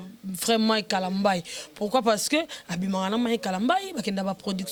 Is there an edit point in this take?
no; 0 cuts

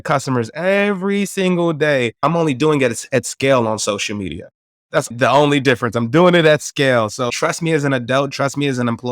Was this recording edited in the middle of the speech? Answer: yes; 3 cuts; at 2.2 s, 5.1 s, 7.3 s

